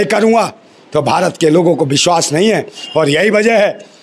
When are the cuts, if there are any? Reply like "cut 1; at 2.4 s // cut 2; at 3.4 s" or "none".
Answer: none